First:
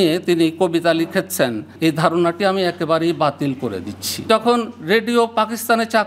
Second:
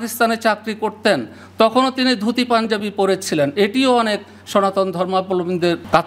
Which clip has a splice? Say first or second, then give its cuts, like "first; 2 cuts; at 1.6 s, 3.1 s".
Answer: first; 2 cuts; at 1.7 s, 4.3 s